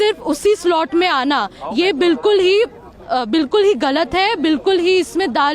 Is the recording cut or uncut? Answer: uncut